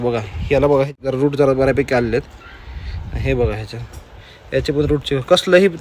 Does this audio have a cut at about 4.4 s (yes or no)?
no